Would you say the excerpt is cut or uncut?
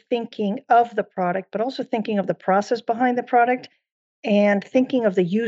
uncut